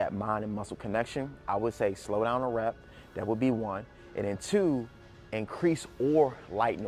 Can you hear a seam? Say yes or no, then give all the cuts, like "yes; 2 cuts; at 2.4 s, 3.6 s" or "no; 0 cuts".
no; 0 cuts